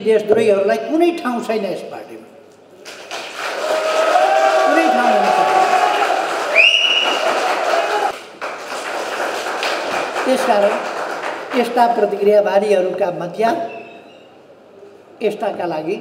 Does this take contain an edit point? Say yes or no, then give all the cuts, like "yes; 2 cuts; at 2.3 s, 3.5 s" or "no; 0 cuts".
yes; 1 cut; at 8.1 s